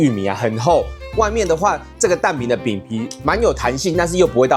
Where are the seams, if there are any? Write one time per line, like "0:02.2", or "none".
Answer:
none